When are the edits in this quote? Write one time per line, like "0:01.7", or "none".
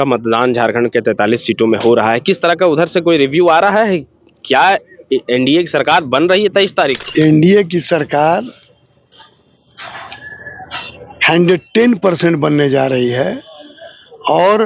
0:07.0